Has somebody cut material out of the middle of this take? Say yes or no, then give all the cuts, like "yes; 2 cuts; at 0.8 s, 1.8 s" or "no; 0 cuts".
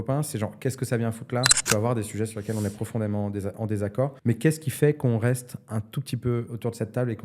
yes; 2 cuts; at 1.6 s, 4.2 s